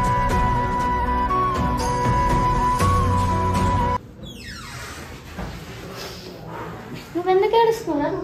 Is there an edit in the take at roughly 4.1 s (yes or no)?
yes